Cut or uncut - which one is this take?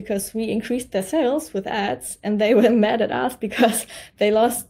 uncut